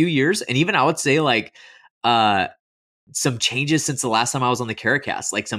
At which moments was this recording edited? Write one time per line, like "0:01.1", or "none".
none